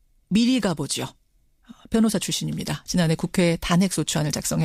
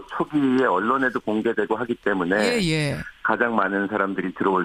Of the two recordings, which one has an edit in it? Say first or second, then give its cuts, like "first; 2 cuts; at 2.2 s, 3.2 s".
second; 1 cut; at 1.4 s